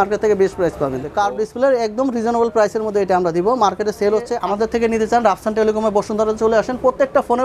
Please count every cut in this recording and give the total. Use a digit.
2